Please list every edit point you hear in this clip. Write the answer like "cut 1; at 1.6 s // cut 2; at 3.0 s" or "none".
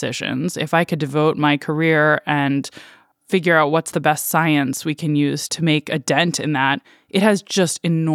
none